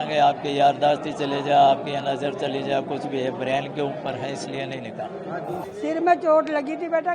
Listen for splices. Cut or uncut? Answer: cut